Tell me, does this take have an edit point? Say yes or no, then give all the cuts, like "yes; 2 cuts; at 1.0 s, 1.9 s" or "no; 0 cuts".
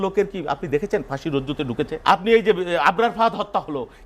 yes; 1 cut; at 2.0 s